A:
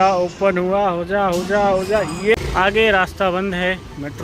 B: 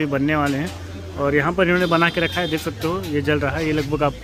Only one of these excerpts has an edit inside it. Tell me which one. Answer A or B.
A